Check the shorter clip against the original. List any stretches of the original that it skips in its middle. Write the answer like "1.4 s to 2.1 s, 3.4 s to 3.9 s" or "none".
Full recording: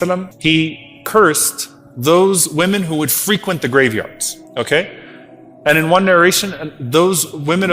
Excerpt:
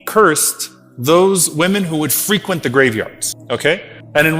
4.4 s to 5.0 s